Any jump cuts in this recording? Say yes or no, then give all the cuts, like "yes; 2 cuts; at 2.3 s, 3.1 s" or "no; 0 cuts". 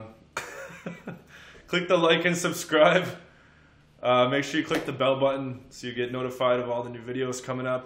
no; 0 cuts